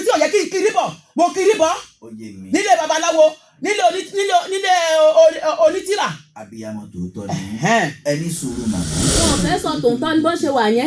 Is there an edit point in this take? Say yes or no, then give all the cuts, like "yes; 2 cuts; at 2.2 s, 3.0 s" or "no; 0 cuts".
yes; 1 cut; at 9.2 s